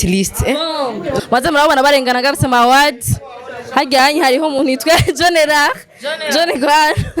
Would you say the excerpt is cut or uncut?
cut